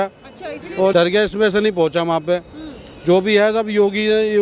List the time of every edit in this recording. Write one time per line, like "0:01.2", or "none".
none